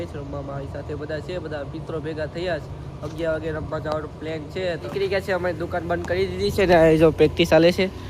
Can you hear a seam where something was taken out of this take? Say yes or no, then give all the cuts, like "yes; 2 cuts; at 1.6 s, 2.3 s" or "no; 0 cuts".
yes; 1 cut; at 4.9 s